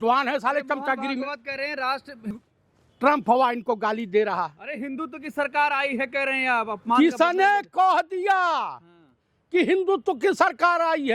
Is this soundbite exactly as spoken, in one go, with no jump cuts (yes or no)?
no